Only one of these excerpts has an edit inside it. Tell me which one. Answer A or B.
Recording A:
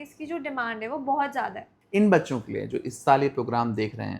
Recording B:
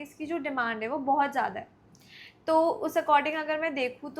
A